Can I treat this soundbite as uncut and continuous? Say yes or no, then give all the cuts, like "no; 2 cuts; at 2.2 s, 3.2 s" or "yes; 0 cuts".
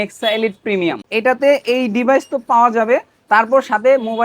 no; 1 cut; at 1.1 s